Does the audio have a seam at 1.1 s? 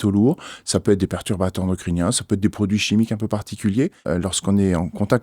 no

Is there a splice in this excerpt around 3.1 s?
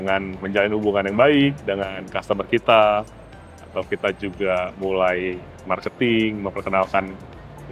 no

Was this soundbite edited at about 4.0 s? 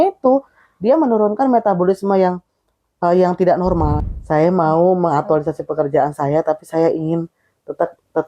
yes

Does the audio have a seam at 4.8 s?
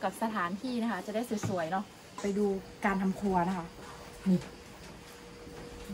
no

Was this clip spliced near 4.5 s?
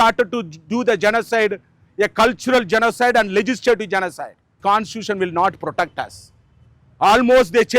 yes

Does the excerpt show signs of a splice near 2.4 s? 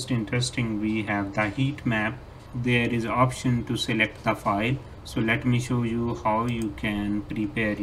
yes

